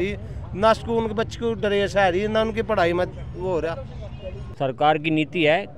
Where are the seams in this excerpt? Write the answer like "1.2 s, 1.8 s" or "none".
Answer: 4.4 s